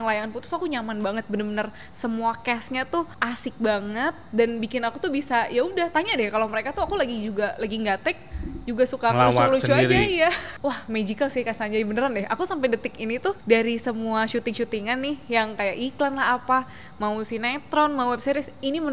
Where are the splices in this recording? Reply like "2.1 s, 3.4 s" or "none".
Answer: 3.1 s, 10.4 s, 13.4 s